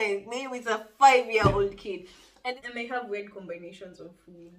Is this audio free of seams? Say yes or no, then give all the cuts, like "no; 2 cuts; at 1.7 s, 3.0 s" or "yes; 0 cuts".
no; 1 cut; at 2.5 s